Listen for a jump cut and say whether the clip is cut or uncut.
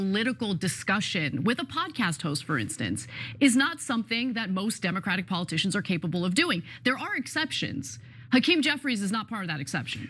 uncut